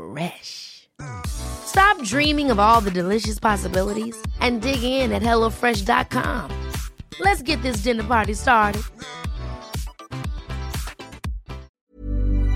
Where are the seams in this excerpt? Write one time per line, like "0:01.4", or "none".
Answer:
0:11.7

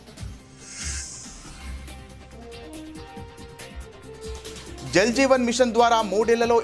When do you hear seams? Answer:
none

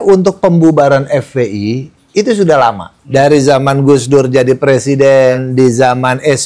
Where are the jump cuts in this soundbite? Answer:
0:02.9
0:05.3

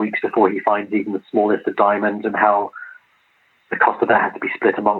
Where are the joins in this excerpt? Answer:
none

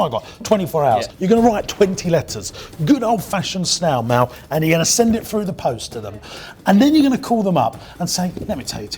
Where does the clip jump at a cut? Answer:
0:01.1

